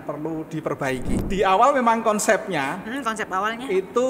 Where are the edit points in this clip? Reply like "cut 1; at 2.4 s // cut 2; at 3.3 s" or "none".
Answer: cut 1; at 1.2 s